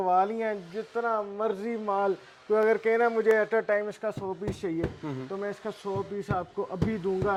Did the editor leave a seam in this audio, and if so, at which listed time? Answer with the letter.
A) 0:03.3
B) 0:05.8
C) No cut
C